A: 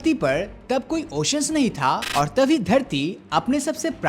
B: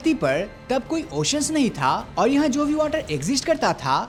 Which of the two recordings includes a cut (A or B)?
A